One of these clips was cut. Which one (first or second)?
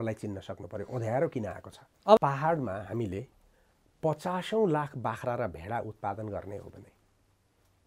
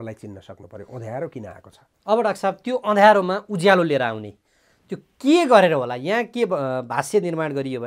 first